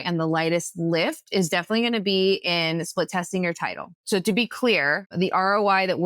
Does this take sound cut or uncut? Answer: cut